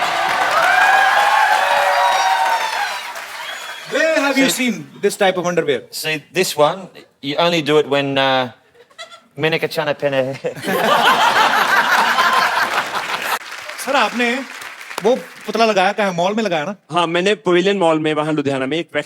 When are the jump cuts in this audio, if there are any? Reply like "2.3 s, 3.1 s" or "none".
13.4 s